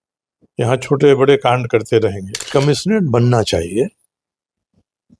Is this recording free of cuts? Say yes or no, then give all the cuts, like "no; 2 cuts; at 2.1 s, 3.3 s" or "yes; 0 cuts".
no; 1 cut; at 2.5 s